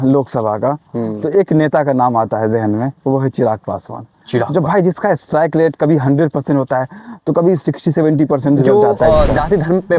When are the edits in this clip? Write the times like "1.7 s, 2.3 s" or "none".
8.7 s

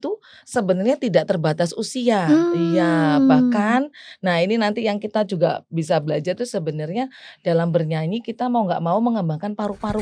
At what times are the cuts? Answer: none

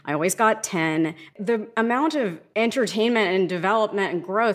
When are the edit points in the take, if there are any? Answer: 1.2 s, 2.4 s

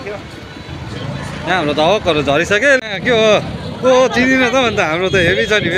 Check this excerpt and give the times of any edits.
2.8 s

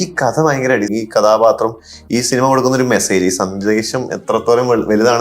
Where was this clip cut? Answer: 0.9 s

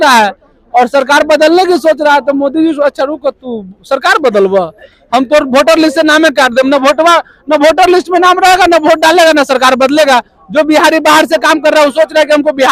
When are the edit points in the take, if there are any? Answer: none

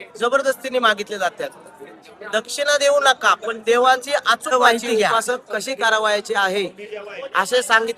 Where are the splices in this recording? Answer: 4.8 s

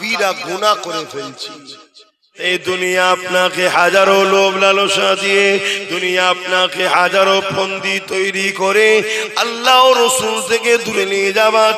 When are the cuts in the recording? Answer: 2.3 s

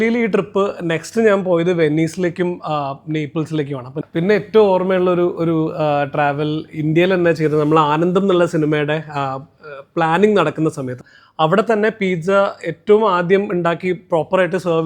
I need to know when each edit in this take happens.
3.9 s, 10.9 s

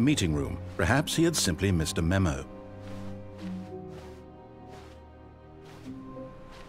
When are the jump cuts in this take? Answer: 2.4 s

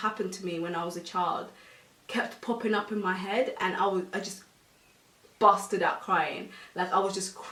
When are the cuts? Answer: none

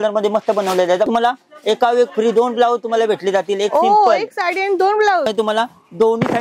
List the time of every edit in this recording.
1.1 s, 5.3 s

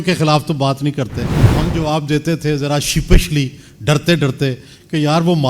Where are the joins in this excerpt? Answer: 1.5 s

